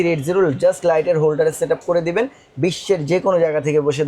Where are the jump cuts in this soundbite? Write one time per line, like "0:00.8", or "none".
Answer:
none